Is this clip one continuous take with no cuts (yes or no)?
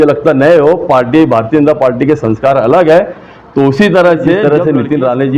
no